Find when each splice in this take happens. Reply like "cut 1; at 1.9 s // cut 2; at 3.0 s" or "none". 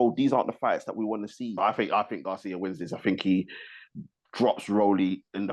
cut 1; at 1.5 s